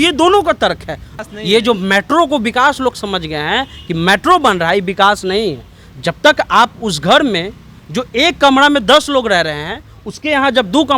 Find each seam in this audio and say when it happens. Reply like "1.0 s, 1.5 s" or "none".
1.3 s